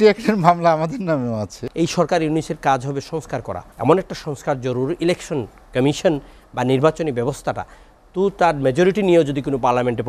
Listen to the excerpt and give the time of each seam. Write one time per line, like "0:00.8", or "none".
0:01.6
0:03.6